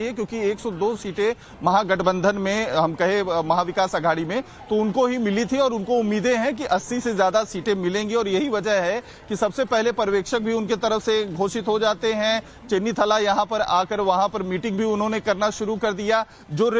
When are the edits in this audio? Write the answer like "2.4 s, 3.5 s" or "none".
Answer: 9.2 s